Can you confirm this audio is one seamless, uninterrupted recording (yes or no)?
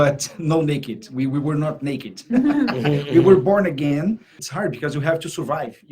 no